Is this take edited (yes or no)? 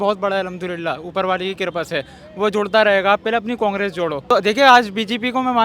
yes